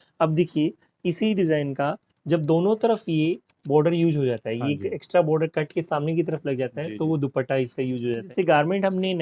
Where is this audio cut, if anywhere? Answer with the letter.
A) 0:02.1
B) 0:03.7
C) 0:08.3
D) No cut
C